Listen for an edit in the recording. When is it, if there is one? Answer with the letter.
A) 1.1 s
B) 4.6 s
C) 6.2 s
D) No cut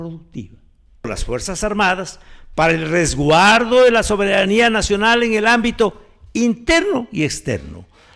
A